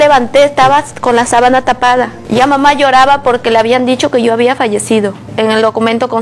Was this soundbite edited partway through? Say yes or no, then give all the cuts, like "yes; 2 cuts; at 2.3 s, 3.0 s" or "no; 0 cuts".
no; 0 cuts